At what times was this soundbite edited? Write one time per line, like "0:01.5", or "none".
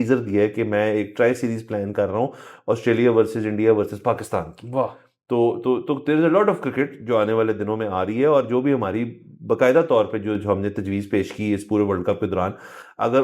none

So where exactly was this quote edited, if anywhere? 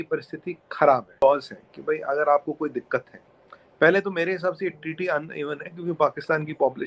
0:01.2

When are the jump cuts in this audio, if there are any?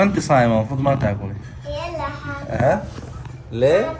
none

